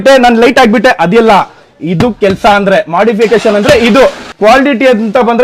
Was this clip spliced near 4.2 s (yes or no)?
yes